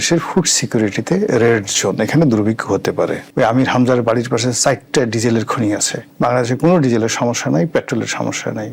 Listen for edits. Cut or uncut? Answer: cut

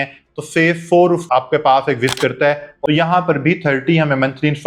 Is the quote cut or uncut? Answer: cut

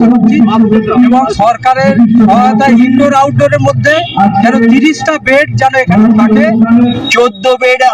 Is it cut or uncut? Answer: cut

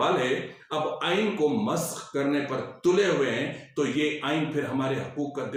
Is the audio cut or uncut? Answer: uncut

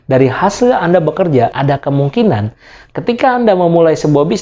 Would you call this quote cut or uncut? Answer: cut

